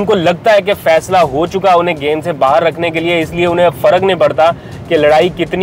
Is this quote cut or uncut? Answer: uncut